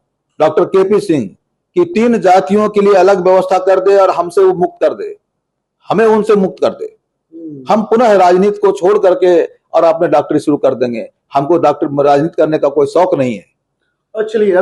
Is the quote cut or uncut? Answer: uncut